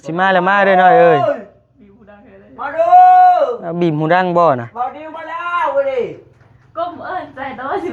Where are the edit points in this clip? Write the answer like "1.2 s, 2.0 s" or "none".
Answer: none